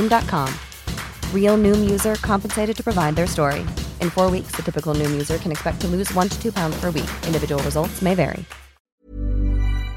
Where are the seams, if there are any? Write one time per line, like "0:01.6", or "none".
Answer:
0:08.9